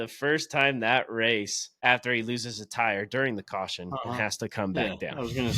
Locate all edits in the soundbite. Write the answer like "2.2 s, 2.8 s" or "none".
1.6 s